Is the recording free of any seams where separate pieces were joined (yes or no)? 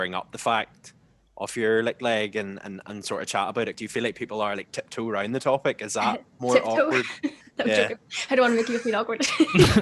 no